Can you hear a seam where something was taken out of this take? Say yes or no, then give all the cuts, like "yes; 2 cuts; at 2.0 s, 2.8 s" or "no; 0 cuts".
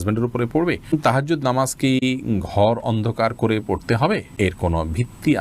yes; 2 cuts; at 0.9 s, 4.3 s